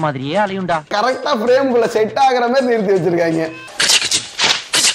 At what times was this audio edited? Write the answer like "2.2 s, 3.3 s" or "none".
0.9 s